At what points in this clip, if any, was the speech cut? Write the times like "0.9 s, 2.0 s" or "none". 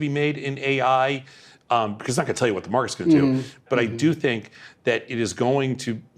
3.6 s